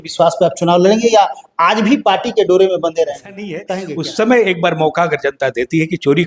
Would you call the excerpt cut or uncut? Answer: cut